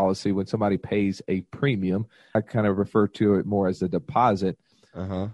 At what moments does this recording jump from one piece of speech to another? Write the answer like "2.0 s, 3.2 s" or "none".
2.3 s